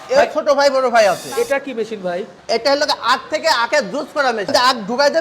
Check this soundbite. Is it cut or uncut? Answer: cut